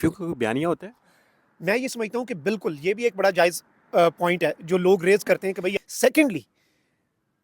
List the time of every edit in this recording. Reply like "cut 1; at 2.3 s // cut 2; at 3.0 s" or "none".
cut 1; at 5.7 s